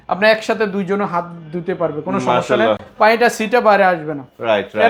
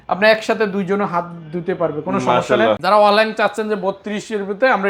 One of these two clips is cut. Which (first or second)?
second